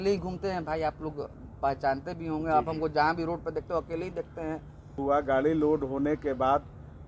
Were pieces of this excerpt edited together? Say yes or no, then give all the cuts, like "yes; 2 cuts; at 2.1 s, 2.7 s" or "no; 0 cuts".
yes; 1 cut; at 5.0 s